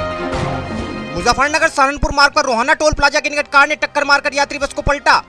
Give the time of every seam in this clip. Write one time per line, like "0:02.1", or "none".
0:00.9